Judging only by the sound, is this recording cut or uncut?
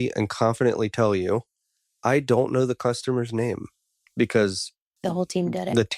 cut